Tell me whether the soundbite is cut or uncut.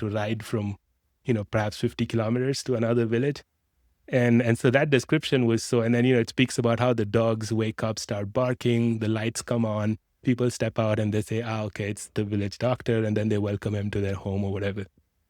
uncut